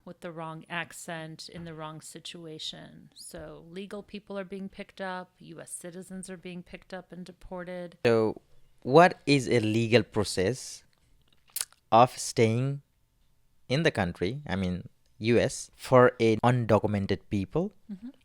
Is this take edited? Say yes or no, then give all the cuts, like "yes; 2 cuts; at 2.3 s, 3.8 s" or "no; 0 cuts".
yes; 3 cuts; at 8.0 s, 15.7 s, 16.4 s